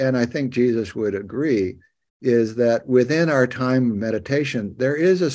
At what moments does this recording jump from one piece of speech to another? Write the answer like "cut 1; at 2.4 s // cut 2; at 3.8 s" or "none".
none